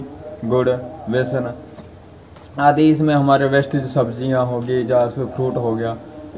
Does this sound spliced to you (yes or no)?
no